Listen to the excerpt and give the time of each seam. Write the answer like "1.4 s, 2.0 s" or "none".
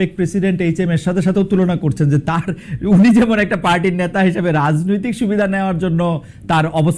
none